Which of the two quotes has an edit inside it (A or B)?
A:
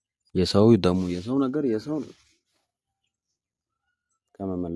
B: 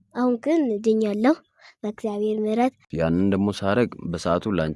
B